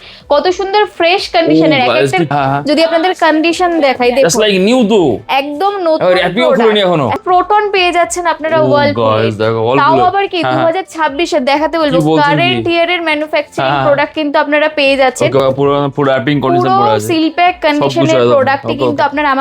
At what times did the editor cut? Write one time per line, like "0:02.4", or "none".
0:02.3
0:07.2
0:15.4